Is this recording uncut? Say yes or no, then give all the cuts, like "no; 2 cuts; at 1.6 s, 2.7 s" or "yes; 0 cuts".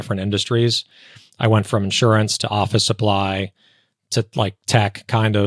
yes; 0 cuts